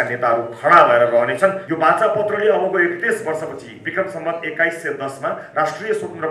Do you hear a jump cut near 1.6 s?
yes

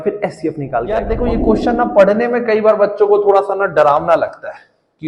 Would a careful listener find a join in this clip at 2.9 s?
no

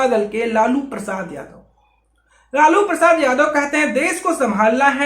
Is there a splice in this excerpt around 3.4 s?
no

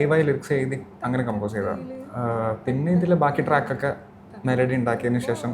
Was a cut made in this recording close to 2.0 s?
yes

